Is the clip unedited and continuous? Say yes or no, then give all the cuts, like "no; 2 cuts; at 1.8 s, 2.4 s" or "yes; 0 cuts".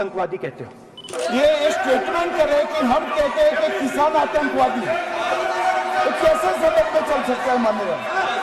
no; 1 cut; at 1.1 s